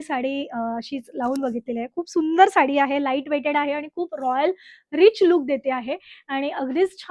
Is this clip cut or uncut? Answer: uncut